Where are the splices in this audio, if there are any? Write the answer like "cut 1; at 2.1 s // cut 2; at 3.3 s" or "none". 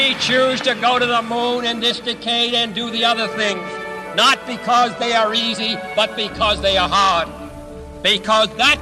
none